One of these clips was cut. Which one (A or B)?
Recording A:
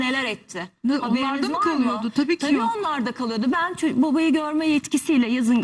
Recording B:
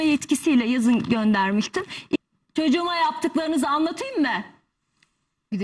B